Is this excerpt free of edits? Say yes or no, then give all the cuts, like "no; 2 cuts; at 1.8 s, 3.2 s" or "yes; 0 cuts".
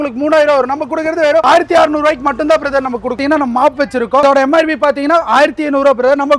no; 3 cuts; at 1.4 s, 3.2 s, 4.2 s